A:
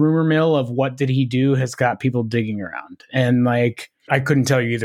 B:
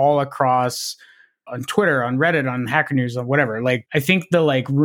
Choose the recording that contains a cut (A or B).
B